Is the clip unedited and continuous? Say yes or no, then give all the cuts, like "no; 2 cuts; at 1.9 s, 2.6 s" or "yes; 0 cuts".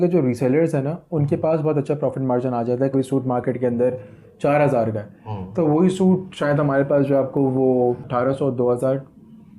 no; 2 cuts; at 2.9 s, 8.0 s